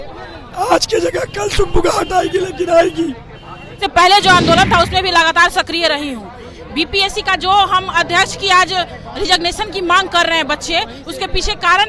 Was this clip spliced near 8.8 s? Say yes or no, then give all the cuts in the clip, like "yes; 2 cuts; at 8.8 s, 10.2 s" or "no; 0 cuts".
no; 1 cut; at 3.8 s